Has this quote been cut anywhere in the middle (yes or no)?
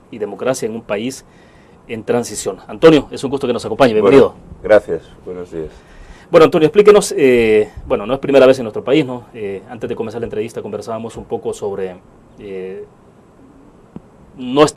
yes